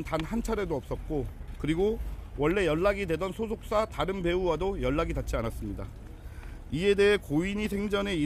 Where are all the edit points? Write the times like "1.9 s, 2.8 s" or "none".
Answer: none